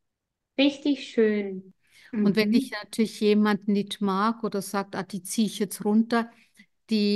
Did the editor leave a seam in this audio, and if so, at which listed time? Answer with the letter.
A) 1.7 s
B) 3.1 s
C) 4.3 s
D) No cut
A